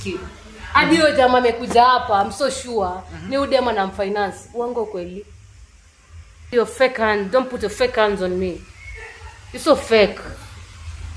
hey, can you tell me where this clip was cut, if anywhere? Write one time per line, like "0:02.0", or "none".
0:06.5